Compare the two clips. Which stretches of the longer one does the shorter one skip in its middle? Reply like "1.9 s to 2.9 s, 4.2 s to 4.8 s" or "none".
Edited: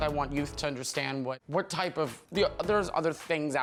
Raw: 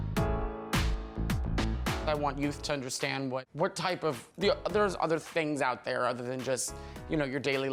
none